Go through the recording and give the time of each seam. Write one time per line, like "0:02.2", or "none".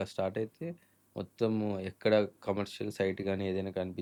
none